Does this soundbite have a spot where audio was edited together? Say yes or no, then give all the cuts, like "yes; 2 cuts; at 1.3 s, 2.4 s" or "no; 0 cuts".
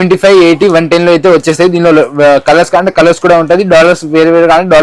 no; 0 cuts